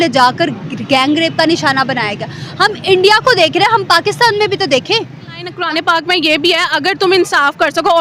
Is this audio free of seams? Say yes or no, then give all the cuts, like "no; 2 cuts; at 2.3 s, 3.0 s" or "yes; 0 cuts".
no; 1 cut; at 5.5 s